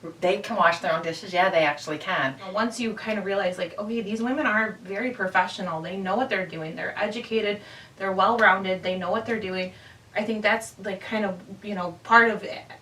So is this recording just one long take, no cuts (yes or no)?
no